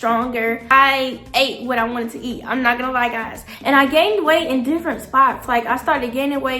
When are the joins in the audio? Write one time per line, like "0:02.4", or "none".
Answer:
0:00.7
0:03.5